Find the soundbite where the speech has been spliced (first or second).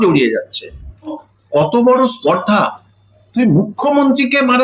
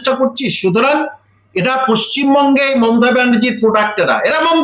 first